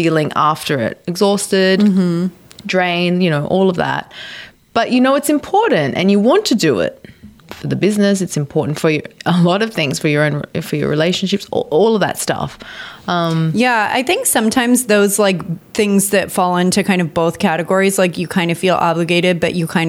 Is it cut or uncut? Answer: cut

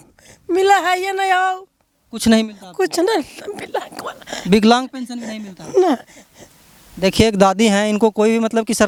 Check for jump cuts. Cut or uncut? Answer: uncut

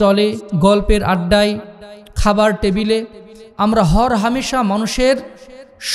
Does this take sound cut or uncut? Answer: uncut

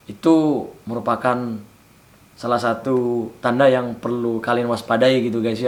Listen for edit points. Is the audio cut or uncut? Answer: uncut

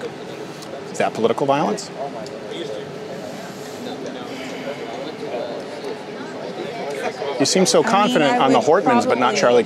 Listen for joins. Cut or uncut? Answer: uncut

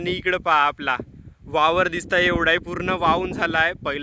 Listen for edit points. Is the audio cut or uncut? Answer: uncut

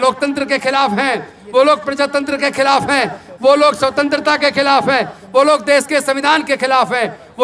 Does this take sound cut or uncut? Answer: uncut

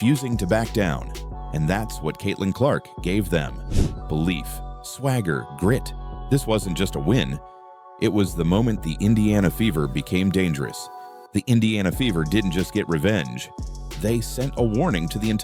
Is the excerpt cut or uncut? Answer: uncut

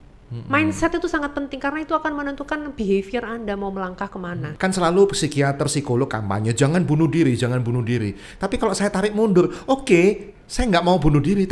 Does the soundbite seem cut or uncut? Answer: cut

